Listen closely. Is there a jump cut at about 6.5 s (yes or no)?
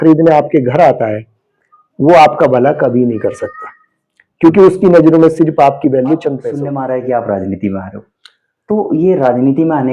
yes